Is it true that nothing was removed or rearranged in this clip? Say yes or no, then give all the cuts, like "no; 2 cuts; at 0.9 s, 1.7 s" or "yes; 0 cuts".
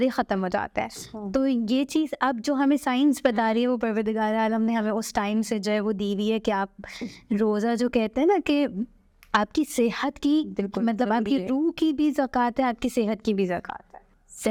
yes; 0 cuts